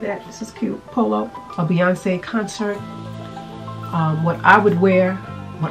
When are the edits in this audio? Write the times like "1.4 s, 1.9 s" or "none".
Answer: 1.4 s